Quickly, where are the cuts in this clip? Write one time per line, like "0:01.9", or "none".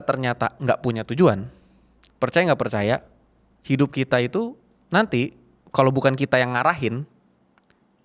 none